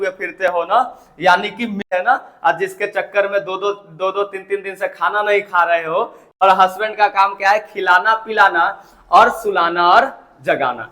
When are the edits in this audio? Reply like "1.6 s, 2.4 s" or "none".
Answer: 1.8 s, 6.2 s